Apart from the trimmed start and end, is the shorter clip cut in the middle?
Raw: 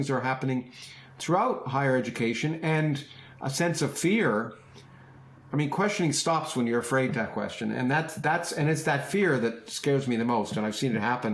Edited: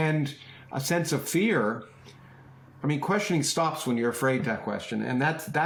no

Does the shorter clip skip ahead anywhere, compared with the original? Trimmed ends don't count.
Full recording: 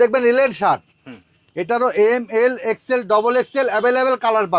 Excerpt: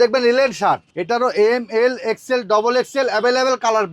yes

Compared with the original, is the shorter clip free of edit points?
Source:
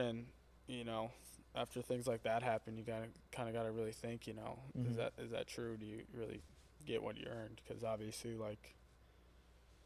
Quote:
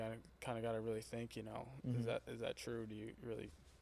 yes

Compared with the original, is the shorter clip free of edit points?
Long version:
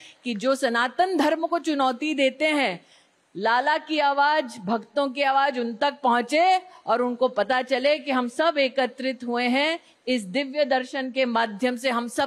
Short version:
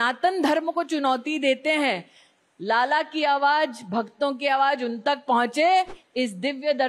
no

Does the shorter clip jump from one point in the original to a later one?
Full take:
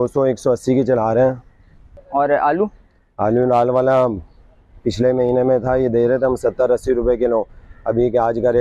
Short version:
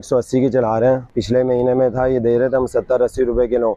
yes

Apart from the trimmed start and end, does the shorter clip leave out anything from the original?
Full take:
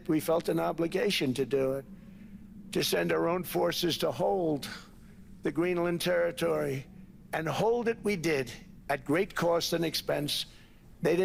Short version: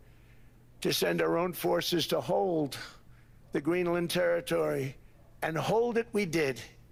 no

